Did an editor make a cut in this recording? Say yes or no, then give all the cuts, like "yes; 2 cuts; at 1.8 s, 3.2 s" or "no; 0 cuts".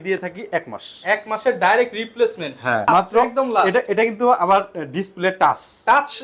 yes; 1 cut; at 2.9 s